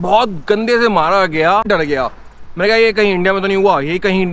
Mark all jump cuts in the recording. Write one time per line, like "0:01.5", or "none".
0:01.7